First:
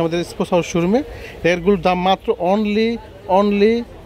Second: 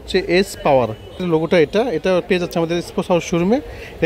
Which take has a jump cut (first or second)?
second